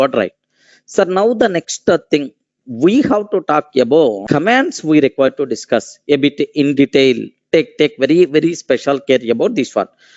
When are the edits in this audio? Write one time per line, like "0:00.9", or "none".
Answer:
0:04.2